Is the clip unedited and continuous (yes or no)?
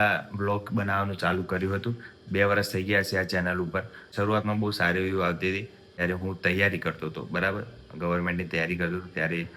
no